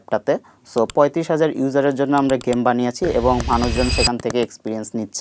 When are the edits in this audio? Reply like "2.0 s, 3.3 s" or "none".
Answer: none